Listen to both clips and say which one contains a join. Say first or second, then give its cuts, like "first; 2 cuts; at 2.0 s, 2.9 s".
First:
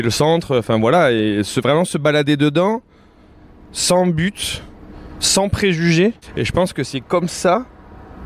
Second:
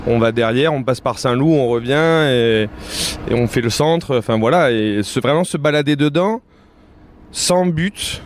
first; 1 cut; at 6.3 s